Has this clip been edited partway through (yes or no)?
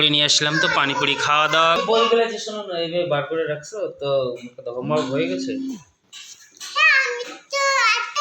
yes